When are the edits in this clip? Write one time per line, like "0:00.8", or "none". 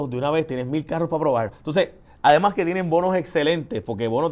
0:01.6